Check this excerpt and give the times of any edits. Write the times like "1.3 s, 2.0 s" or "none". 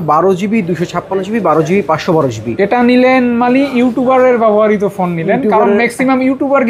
none